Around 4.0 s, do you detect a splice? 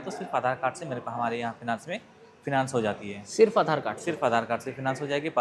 no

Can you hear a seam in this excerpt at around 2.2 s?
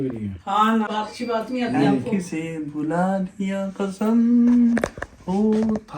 no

